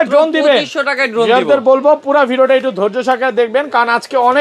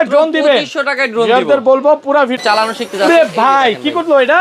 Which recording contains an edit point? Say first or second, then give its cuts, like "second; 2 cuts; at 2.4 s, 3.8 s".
second; 1 cut; at 2.4 s